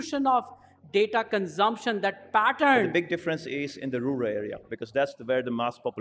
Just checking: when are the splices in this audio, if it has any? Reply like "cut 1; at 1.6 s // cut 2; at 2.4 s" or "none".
cut 1; at 2.9 s